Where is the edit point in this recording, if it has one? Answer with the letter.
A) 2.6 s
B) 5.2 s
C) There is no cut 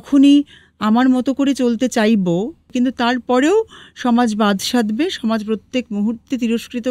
A